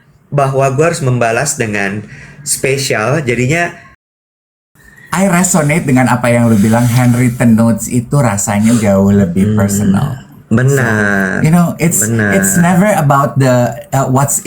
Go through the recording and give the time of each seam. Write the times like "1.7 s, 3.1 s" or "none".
4.4 s